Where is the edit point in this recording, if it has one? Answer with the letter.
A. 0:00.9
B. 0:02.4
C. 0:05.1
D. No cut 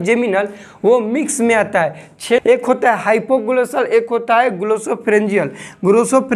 B